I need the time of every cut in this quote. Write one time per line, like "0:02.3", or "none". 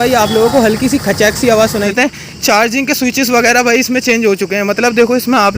0:01.9